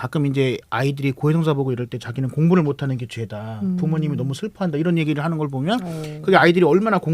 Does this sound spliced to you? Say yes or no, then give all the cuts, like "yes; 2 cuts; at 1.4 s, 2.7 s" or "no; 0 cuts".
no; 0 cuts